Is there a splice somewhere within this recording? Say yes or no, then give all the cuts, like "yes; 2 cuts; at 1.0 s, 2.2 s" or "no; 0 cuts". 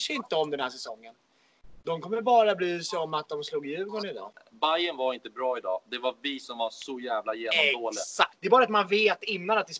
yes; 2 cuts; at 4.4 s, 8.4 s